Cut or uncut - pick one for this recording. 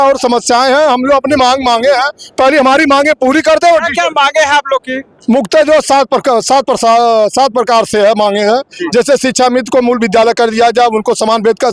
uncut